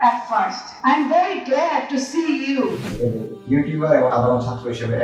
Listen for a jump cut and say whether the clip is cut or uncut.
cut